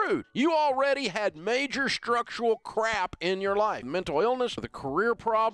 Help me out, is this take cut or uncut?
cut